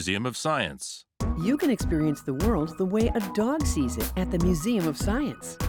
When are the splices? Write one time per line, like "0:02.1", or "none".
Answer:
none